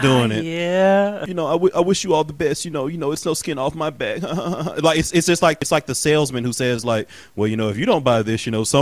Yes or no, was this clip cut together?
yes